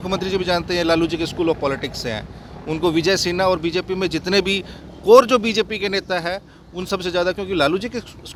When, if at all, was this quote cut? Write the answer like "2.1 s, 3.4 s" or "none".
none